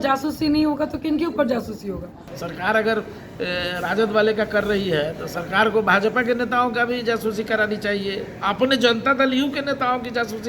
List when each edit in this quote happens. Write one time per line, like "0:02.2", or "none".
0:02.2